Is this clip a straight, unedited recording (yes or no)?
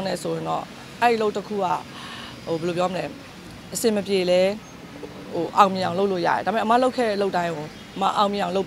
yes